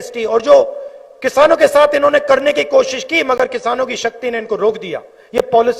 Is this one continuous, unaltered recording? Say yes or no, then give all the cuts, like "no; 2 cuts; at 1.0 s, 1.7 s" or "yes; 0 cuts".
yes; 0 cuts